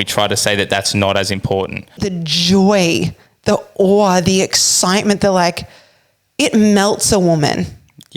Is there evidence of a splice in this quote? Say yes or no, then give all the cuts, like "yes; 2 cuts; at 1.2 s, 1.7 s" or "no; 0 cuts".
yes; 1 cut; at 2.1 s